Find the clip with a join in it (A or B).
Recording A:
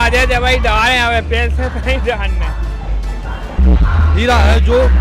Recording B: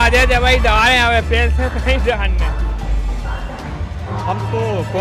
A